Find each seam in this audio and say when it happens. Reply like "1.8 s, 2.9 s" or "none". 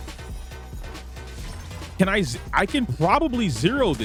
none